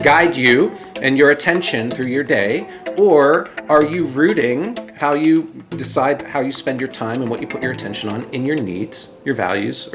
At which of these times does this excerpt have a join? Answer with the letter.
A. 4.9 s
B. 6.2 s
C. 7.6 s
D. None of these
B